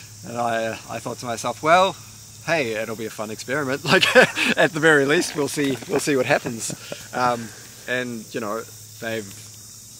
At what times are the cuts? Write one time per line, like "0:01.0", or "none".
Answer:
none